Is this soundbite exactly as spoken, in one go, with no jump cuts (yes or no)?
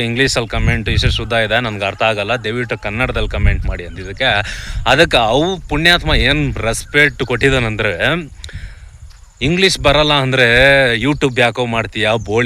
yes